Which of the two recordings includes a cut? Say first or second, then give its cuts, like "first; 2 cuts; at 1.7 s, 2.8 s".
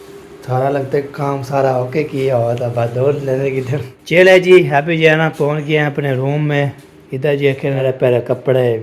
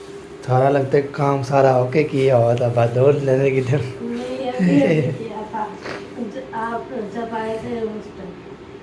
first; 2 cuts; at 3.9 s, 7.8 s